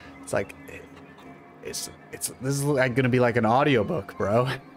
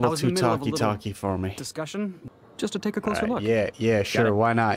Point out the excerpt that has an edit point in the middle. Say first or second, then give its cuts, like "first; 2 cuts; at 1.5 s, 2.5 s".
second; 1 cut; at 2.2 s